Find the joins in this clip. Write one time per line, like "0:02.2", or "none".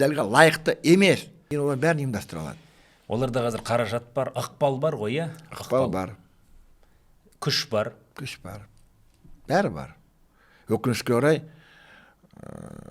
0:01.4